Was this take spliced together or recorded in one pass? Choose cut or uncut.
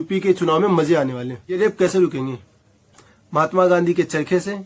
cut